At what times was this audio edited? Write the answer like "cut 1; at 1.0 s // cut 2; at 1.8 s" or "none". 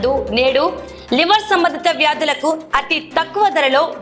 none